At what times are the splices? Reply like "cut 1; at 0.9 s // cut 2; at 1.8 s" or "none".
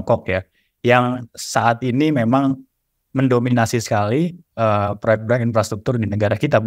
none